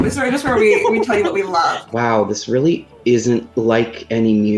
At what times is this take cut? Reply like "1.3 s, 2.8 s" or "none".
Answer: 1.9 s, 3.5 s